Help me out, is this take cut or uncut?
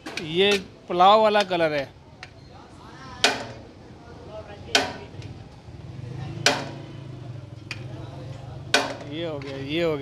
uncut